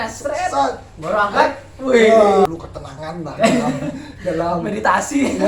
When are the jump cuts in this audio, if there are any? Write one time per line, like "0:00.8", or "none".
0:02.5